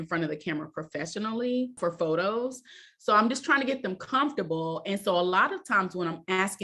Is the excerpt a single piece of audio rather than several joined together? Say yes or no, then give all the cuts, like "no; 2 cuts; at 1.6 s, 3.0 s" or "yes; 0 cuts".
no; 1 cut; at 1.7 s